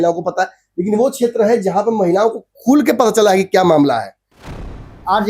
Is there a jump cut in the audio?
yes; 1 cut; at 4.4 s

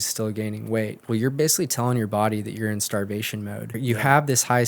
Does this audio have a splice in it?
yes; 2 cuts; at 1.0 s, 3.8 s

